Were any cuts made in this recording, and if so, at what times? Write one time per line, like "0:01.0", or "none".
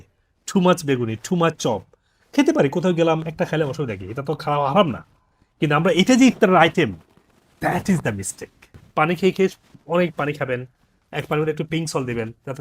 0:08.7

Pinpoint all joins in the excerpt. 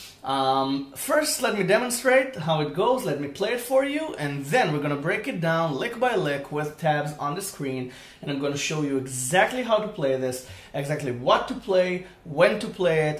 0:09.7

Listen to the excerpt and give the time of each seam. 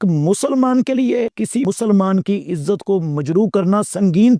0:01.6

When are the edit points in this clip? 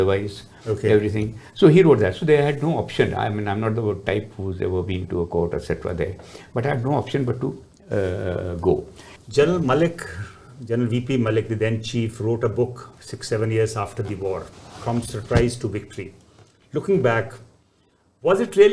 0:09.1

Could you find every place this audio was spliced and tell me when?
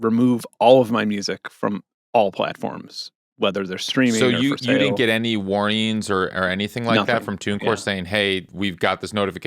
0:08.5

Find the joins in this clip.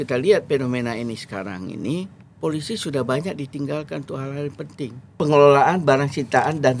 0:02.2
0:05.2

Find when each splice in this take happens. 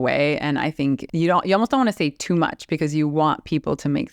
0:01.1

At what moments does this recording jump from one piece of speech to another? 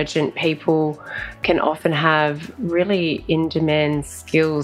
none

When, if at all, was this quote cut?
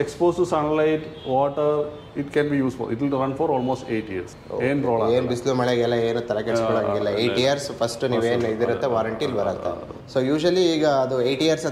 none

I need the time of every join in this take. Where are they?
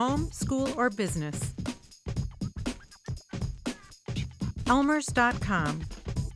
0:01.6
0:04.0

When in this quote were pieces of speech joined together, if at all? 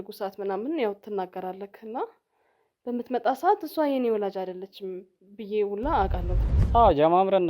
0:06.3

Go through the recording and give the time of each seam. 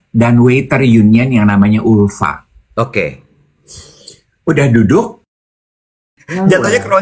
0:05.8

